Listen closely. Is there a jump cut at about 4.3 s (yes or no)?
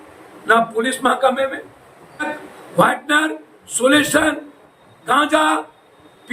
no